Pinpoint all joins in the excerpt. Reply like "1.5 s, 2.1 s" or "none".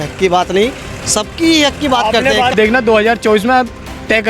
2.5 s